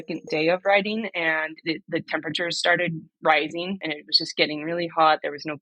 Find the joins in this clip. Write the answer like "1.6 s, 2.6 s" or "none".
3.8 s

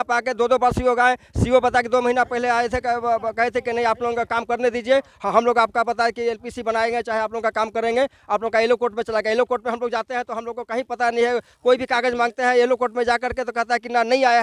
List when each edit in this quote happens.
none

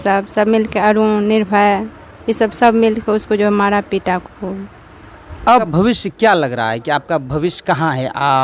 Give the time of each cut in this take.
5.6 s

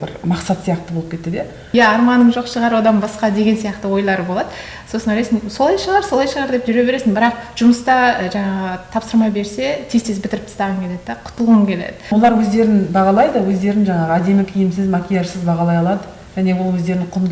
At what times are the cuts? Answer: 1.6 s, 12.0 s

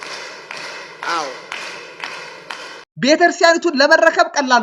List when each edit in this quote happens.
2.9 s

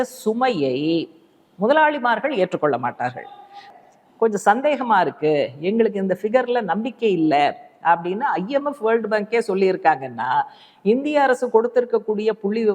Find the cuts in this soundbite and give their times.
3.7 s

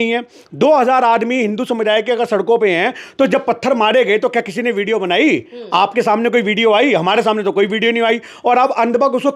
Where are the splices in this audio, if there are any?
none

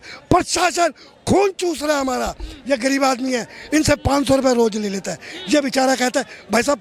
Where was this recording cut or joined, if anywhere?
none

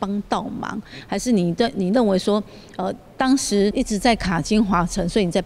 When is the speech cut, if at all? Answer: 0.9 s, 3.7 s

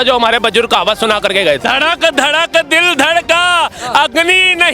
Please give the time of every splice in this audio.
1.6 s

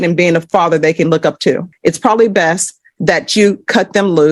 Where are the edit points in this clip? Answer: 1.7 s

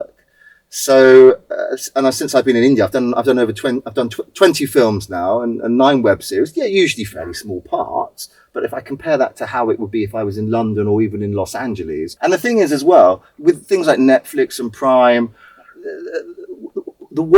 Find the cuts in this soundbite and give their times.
12.1 s

